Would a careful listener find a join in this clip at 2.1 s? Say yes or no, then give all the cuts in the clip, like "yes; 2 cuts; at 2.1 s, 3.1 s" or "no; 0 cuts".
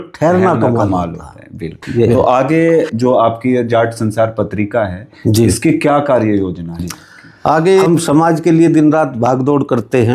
yes; 2 cuts; at 2.1 s, 7.9 s